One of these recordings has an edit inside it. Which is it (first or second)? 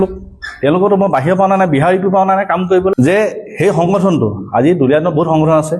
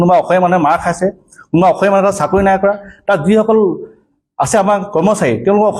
first